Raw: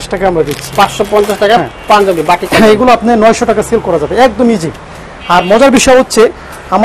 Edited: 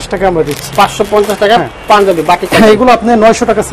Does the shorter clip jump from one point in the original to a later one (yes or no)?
no